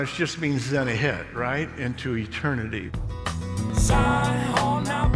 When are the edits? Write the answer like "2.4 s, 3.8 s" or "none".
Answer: 2.9 s